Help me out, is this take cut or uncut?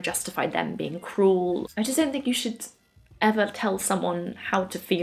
uncut